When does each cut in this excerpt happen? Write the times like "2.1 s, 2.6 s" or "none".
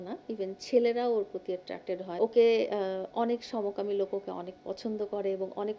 2.1 s